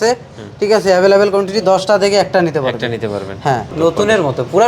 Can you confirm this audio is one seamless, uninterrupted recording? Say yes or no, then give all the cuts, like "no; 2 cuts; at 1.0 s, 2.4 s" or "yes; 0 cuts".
no; 1 cut; at 3.7 s